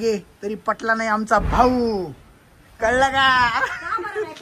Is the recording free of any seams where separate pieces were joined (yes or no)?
yes